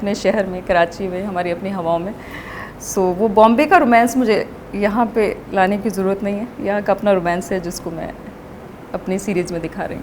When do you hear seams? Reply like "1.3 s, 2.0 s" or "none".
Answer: none